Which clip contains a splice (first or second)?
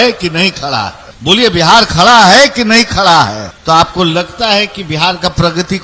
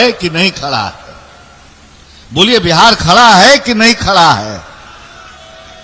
first